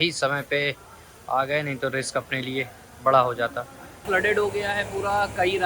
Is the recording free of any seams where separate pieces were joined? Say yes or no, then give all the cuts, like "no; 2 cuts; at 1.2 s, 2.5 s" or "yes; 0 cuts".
no; 1 cut; at 4.0 s